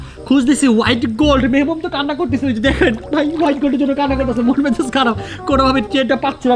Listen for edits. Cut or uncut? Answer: uncut